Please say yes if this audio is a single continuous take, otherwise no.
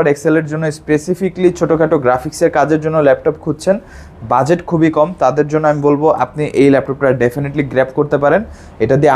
yes